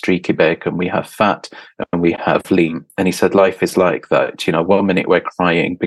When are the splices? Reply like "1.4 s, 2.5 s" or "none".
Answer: 2.8 s